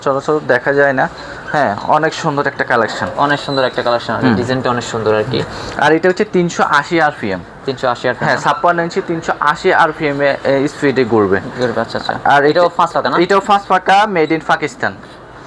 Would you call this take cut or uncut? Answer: uncut